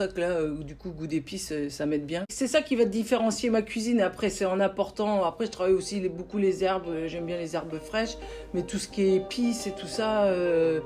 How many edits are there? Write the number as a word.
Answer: one